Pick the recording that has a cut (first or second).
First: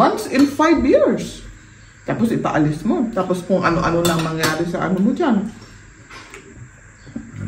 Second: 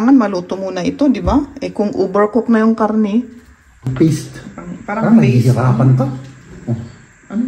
second